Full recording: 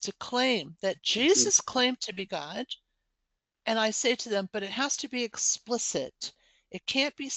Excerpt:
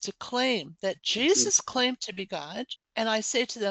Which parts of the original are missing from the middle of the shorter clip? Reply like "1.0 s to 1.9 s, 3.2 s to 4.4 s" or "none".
2.8 s to 3.5 s